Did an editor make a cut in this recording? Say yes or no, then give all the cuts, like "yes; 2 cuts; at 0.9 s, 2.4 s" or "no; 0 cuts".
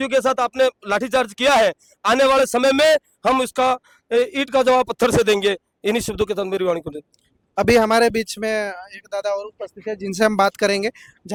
no; 0 cuts